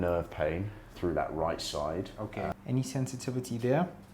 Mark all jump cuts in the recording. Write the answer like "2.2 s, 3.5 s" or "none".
2.5 s